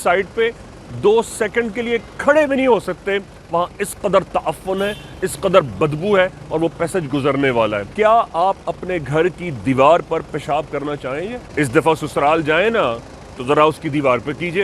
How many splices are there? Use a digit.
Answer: 2